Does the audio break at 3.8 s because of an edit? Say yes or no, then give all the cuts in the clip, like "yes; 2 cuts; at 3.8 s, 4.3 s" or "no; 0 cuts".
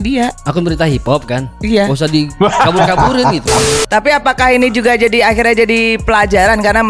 yes; 1 cut; at 3.8 s